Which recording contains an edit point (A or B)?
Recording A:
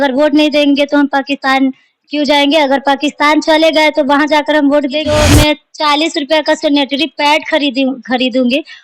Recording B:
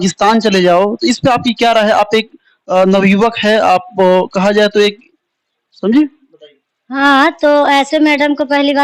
A